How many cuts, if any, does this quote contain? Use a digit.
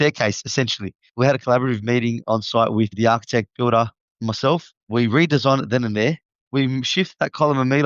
1